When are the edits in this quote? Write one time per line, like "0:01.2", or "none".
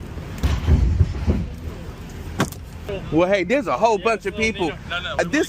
0:02.9